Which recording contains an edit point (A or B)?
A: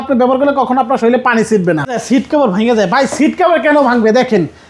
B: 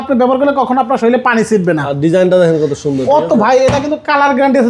A